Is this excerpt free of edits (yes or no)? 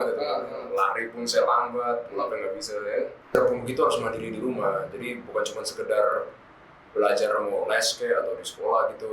no